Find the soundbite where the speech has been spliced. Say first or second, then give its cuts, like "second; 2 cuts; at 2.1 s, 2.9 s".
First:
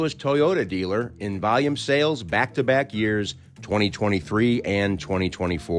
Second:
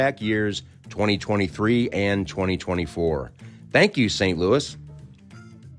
second; 1 cut; at 4.8 s